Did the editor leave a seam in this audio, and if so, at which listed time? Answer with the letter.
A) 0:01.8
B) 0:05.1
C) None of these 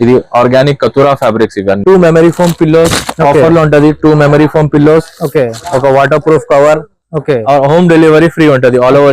A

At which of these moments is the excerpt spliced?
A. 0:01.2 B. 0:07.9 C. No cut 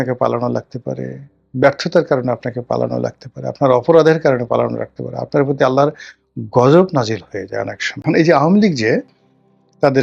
B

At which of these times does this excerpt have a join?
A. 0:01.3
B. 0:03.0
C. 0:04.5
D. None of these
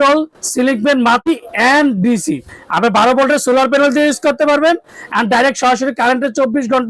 A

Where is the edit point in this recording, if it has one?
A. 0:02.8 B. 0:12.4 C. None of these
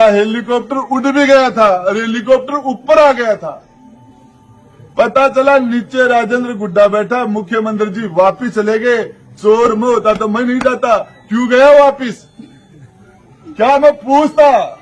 C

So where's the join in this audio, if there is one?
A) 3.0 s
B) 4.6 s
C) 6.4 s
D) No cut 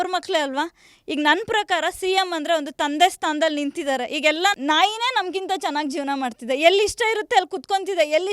B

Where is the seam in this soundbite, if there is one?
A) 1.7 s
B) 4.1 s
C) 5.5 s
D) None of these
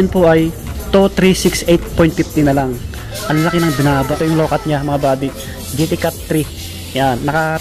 B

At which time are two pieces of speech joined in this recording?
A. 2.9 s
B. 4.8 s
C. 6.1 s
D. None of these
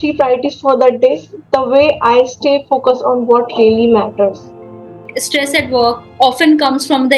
B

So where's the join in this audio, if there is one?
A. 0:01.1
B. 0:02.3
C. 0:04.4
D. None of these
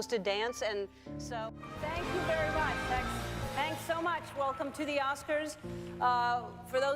A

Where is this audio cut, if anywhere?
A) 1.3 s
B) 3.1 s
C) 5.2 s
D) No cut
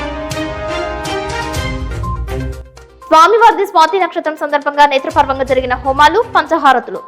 B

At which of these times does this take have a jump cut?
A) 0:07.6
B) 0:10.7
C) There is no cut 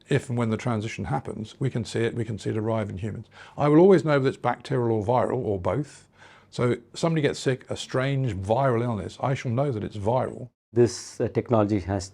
B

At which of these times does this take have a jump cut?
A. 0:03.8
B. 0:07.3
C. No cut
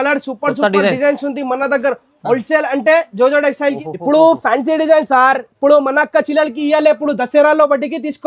A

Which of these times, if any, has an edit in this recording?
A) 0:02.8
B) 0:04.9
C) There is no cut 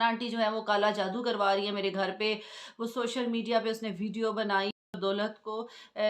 B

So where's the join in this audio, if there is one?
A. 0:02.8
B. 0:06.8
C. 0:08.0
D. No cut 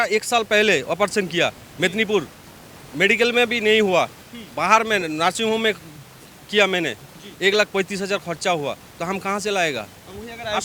D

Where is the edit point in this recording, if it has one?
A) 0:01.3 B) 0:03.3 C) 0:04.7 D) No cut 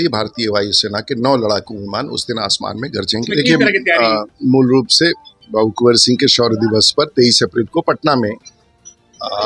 B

